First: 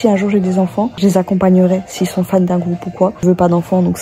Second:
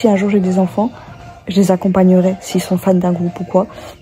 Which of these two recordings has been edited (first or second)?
first